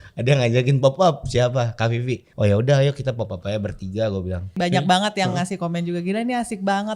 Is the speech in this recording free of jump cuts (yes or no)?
no